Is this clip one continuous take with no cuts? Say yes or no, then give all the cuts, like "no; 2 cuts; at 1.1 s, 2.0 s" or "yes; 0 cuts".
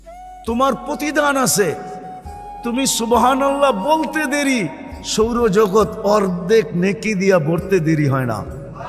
yes; 0 cuts